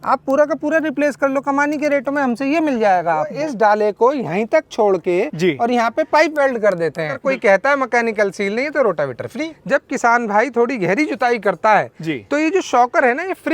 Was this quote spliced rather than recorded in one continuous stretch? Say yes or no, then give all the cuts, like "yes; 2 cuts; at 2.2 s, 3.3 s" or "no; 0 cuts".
yes; 3 cuts; at 3.3 s, 7.2 s, 9.5 s